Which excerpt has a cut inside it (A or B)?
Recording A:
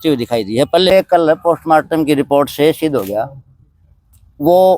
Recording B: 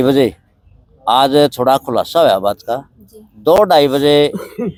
A